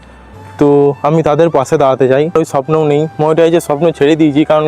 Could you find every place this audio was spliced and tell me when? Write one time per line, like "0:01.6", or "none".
0:02.3